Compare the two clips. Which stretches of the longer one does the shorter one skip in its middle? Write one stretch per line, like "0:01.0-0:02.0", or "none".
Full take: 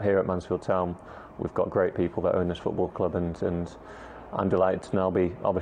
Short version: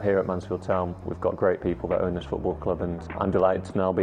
0:01.0-0:01.4
0:03.3-0:04.2